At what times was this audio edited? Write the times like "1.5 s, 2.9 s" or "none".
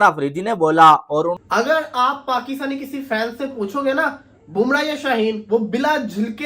1.4 s